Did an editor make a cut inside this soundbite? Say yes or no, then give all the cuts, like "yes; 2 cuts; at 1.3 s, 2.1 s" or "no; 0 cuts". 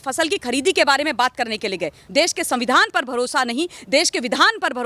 yes; 1 cut; at 2.0 s